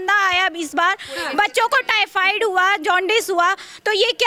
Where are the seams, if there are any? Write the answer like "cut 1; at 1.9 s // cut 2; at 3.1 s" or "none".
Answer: none